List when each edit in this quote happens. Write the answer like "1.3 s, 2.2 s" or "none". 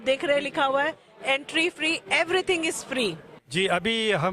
3.4 s